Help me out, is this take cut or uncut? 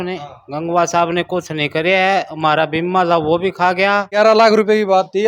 cut